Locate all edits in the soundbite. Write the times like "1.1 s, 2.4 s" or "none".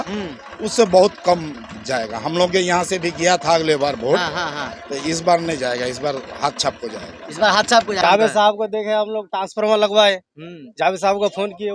8.0 s